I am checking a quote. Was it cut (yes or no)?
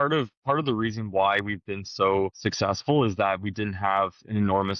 yes